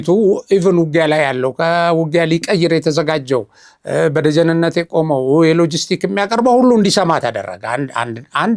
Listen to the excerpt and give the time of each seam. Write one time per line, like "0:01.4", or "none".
none